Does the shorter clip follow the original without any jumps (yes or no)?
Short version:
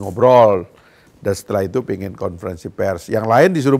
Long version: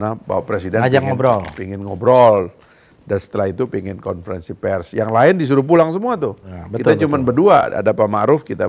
yes